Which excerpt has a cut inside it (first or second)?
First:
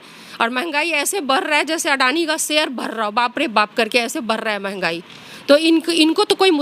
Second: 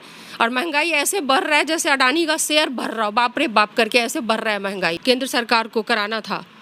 second